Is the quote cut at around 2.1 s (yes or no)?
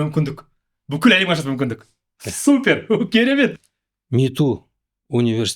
no